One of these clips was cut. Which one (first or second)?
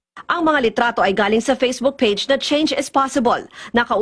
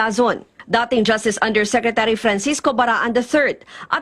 second